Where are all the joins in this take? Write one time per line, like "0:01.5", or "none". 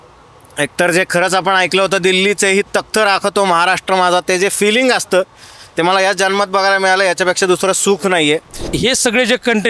0:08.6